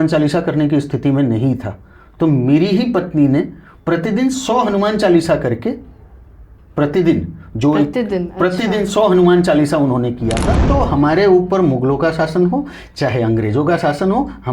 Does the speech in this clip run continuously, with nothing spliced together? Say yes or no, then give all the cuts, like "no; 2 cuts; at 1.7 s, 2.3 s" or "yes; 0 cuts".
no; 1 cut; at 10.5 s